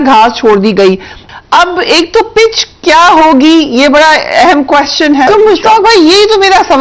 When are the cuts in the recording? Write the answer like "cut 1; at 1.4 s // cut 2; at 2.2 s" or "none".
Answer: cut 1; at 1.2 s // cut 2; at 5.3 s